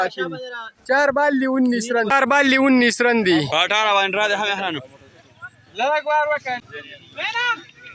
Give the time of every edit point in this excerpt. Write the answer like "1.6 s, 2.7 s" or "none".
2.2 s, 6.4 s